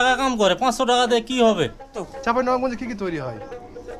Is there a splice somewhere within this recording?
yes; 1 cut; at 2.0 s

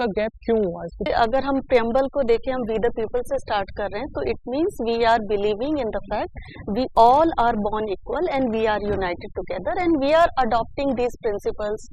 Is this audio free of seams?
no; 1 cut; at 1.1 s

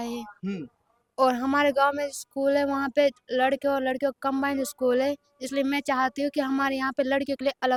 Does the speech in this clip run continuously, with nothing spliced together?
yes; 0 cuts

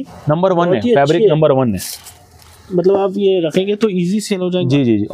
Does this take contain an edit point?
no; 0 cuts

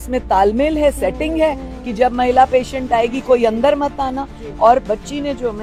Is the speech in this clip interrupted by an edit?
no; 0 cuts

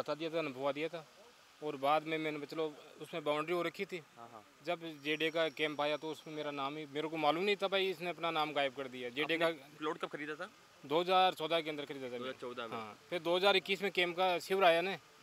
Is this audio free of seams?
yes; 0 cuts

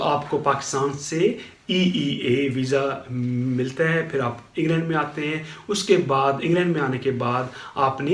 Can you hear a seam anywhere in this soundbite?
no; 0 cuts

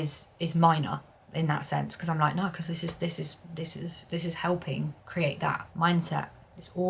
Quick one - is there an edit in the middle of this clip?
yes; 2 cuts; at 5.0 s, 5.7 s

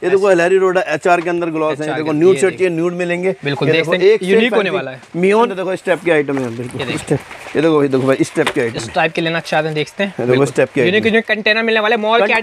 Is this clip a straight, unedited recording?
no; 1 cut; at 5.5 s

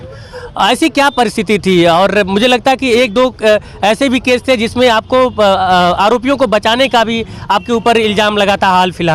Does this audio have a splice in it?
no; 0 cuts

